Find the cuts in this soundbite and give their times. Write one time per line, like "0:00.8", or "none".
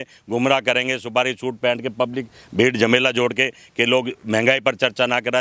none